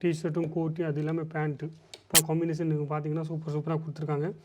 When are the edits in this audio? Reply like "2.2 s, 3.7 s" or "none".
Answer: 2.1 s

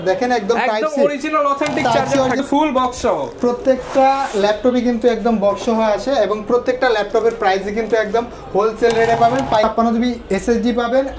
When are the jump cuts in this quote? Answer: 2.4 s, 9.7 s

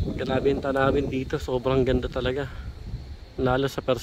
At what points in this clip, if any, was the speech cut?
none

